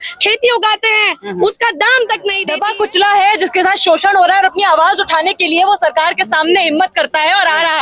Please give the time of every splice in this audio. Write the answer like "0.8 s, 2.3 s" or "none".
2.5 s